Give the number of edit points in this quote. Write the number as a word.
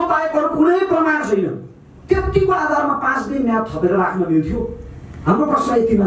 zero